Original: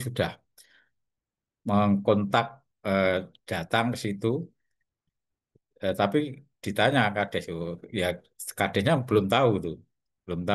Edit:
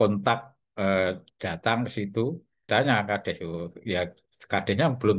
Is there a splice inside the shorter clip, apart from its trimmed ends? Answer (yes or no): yes